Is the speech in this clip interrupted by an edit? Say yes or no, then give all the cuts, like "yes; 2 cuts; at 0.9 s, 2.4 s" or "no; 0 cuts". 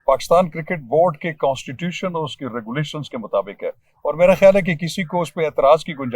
no; 0 cuts